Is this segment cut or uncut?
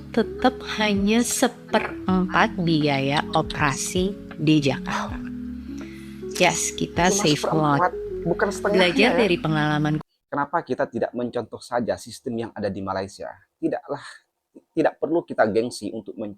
cut